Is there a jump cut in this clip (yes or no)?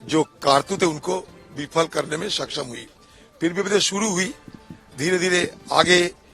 no